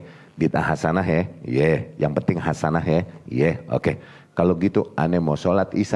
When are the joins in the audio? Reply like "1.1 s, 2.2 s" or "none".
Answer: none